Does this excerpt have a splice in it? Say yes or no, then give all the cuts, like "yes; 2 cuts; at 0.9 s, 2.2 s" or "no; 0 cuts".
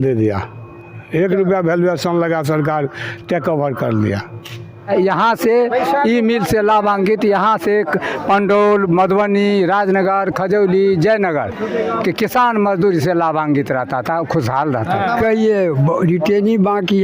yes; 1 cut; at 4.9 s